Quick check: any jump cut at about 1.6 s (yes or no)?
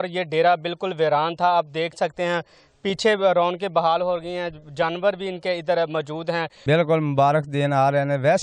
no